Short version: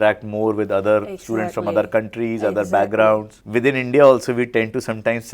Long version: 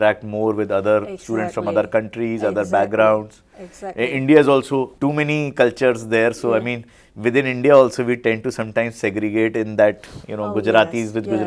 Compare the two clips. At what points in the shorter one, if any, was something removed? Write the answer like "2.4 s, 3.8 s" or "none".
3.4 s